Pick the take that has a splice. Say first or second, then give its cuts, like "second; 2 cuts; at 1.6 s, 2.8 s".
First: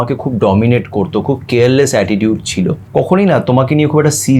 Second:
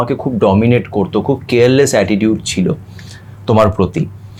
first; 1 cut; at 2.8 s